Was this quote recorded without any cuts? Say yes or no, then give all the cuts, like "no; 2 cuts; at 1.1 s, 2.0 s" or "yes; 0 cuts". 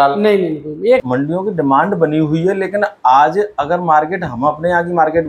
no; 1 cut; at 1.0 s